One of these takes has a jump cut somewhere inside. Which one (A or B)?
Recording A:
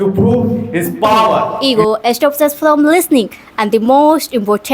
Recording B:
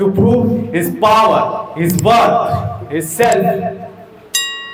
A